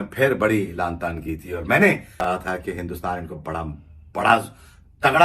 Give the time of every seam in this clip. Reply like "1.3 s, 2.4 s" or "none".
none